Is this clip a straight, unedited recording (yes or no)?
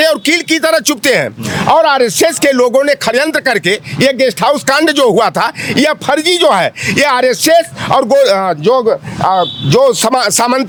yes